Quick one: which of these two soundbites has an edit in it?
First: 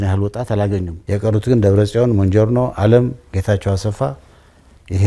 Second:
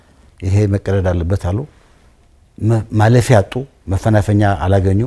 first; 1 cut; at 0.9 s

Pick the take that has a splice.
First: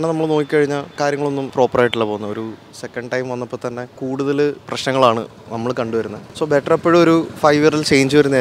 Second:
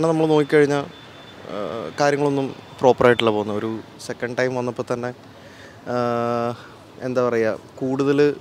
first; 3 cuts; at 1.3 s, 4.4 s, 6.2 s

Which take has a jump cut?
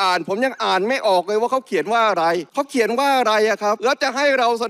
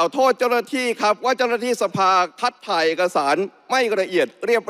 first; 2 cuts; at 2.5 s, 3.8 s

